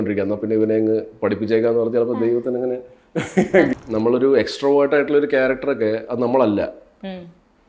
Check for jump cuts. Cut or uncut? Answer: cut